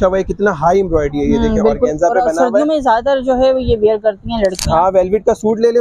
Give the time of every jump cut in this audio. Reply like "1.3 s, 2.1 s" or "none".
none